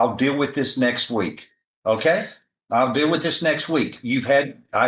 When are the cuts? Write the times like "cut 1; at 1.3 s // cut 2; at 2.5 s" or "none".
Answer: none

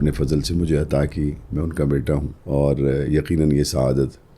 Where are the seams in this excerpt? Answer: cut 1; at 2.3 s

